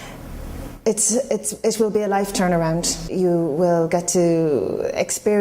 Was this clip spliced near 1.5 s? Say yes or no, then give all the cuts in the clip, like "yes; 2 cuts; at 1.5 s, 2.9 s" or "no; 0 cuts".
no; 1 cut; at 3.1 s